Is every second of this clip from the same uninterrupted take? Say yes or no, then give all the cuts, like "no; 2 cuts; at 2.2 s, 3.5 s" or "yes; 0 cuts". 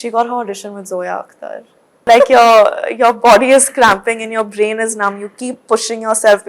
no; 1 cut; at 2.0 s